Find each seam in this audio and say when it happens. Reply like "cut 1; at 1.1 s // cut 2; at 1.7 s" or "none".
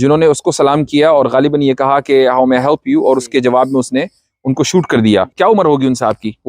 cut 1; at 5.3 s